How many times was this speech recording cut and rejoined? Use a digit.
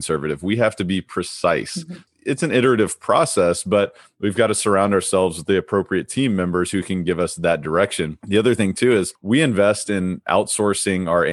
3